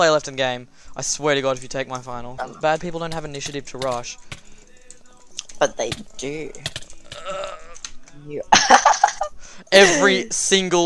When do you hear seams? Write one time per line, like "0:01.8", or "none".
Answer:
0:02.3